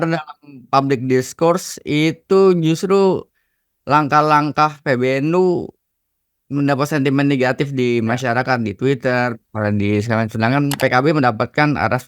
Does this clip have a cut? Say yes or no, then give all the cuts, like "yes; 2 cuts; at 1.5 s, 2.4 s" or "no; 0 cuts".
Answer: yes; 1 cut; at 10.8 s